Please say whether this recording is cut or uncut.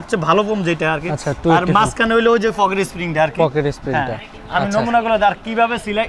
uncut